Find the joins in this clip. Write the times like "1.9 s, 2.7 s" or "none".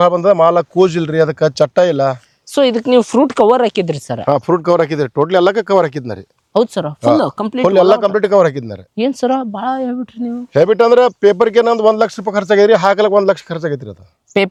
none